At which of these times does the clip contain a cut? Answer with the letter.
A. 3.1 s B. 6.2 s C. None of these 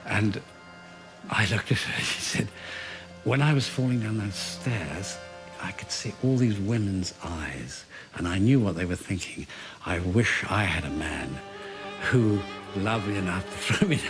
B